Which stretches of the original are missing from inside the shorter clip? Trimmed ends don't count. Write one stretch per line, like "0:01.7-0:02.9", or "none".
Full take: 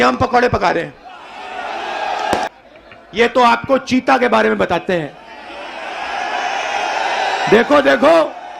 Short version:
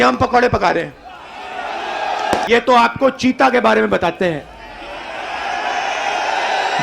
0:02.5-0:03.1

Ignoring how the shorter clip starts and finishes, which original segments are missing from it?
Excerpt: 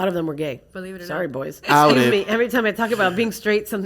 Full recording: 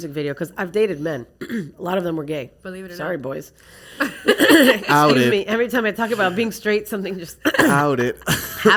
0:03.5-0:04.8

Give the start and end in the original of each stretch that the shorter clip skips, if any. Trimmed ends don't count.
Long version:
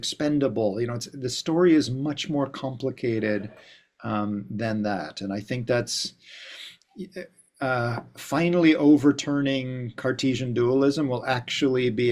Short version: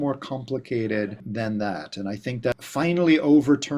0:03.6-0:04.5
0:05.8-0:08.1

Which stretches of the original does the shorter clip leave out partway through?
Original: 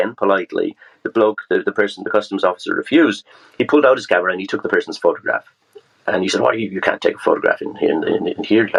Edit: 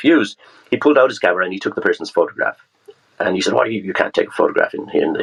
none

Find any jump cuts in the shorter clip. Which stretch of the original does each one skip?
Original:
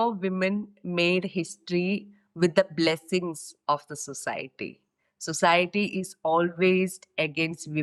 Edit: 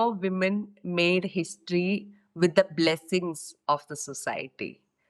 none

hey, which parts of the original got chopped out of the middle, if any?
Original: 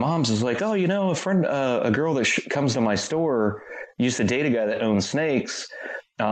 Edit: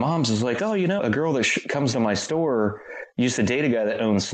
0:01.0-0:01.8

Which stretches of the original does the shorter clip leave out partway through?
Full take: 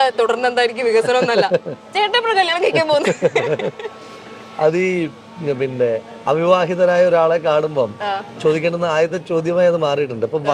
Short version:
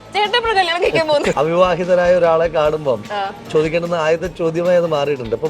0:03.1-0:06.2

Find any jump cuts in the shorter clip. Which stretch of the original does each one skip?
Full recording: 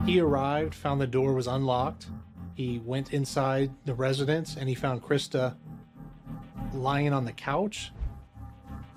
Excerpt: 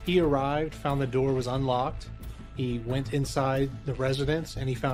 none

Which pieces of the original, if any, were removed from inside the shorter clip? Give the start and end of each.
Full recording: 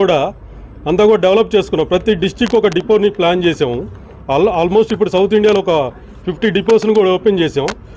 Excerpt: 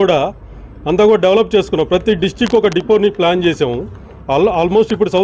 none

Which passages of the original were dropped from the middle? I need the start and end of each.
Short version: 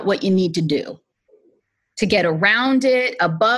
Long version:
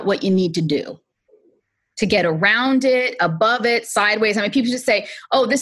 none

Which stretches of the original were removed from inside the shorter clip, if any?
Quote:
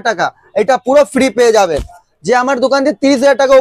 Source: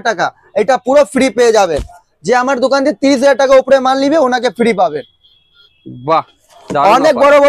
none

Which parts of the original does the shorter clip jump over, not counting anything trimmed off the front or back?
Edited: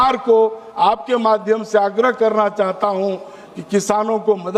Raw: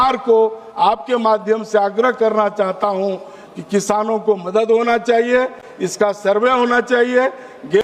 none

